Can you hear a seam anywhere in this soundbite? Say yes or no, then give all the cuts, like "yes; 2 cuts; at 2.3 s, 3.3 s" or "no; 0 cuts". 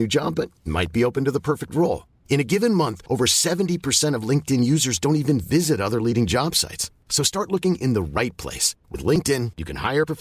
no; 0 cuts